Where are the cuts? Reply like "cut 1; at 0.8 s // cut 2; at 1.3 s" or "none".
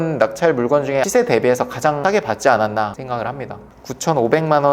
cut 1; at 1.0 s // cut 2; at 2.0 s // cut 3; at 3.6 s